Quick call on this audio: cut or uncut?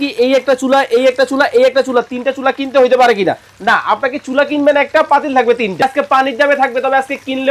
cut